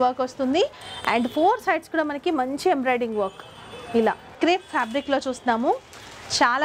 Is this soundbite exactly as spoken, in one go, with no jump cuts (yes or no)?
no